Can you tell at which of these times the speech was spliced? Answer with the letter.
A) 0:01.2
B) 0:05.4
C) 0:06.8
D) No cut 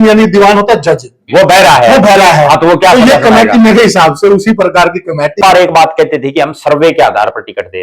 B